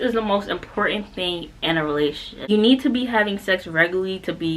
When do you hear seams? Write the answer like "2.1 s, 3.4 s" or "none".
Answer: 2.5 s